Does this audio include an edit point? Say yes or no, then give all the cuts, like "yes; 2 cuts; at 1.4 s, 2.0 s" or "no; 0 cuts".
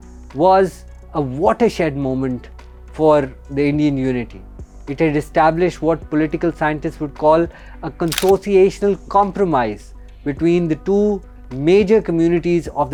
no; 0 cuts